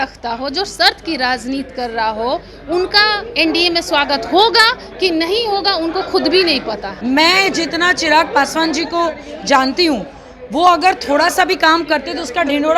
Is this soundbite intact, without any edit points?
no; 1 cut; at 6.9 s

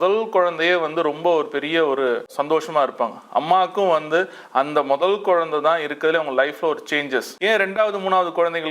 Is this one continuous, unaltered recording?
no; 2 cuts; at 2.4 s, 7.3 s

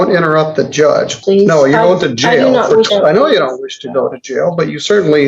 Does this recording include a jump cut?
yes; 2 cuts; at 1.2 s, 2.9 s

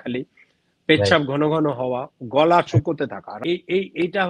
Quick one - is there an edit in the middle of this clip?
yes; 1 cut; at 3.4 s

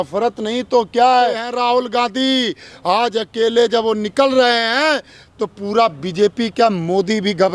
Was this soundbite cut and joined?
yes; 1 cut; at 1.5 s

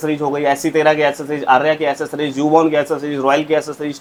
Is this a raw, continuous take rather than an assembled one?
yes; 0 cuts

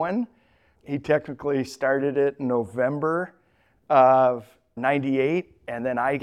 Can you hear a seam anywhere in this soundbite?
no; 0 cuts

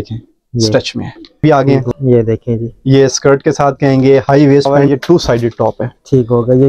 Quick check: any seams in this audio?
yes; 2 cuts; at 1.4 s, 4.8 s

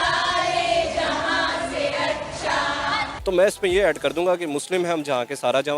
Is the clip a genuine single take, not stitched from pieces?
no; 1 cut; at 3.1 s

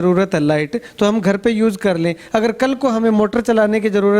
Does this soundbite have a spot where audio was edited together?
no; 0 cuts

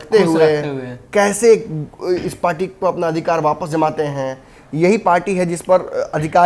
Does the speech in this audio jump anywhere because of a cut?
no; 0 cuts

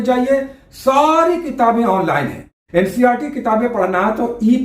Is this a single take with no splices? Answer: no; 1 cut; at 2.5 s

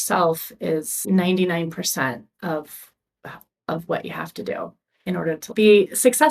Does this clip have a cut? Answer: yes; 2 cuts; at 1.0 s, 5.5 s

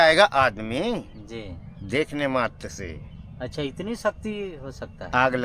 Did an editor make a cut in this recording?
no; 0 cuts

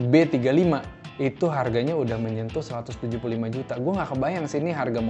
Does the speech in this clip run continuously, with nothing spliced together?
no; 1 cut; at 1.0 s

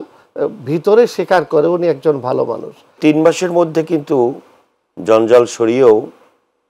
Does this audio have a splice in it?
yes; 1 cut; at 3.0 s

